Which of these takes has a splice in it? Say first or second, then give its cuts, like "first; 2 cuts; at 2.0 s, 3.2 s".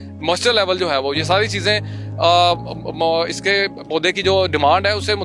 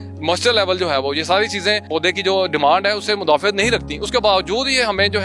second; 1 cut; at 1.8 s